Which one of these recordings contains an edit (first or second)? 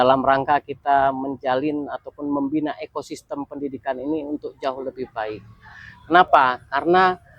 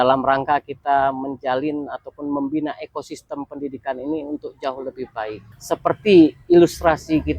second